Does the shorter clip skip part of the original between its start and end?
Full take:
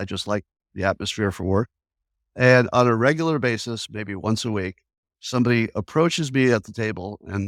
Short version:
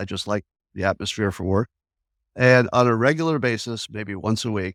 no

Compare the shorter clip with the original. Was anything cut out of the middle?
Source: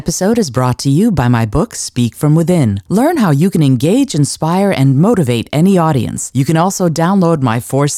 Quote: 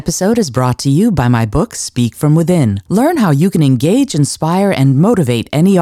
no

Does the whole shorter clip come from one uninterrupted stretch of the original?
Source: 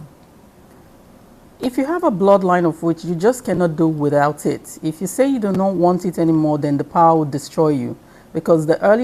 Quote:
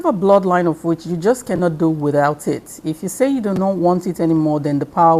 yes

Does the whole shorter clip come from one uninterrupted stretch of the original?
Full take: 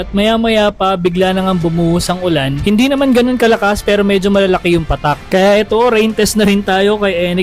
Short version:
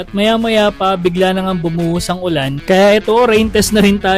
no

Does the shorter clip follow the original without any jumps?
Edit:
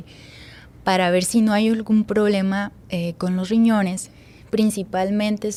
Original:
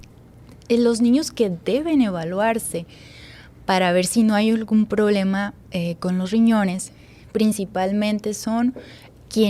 yes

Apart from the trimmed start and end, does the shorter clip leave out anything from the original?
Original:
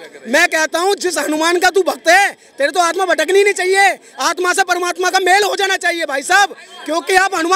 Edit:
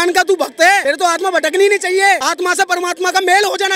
yes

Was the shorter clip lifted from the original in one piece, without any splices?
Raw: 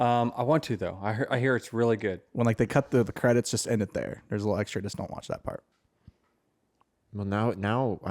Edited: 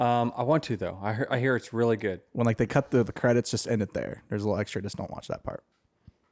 yes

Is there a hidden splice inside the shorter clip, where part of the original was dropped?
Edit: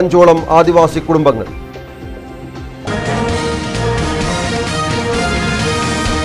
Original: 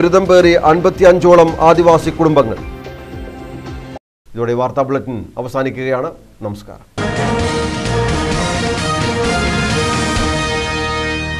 yes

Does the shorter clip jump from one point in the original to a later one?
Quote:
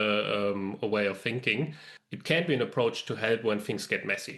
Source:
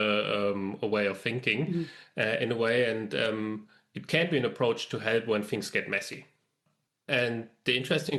yes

